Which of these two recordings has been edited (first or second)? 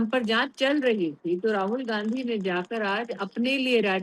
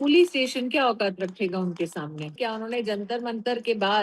second